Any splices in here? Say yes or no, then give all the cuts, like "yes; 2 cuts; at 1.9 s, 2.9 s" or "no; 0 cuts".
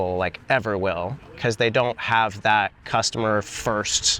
no; 0 cuts